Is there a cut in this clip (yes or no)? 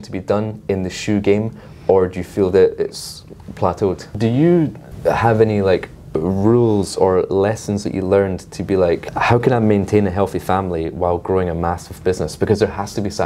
yes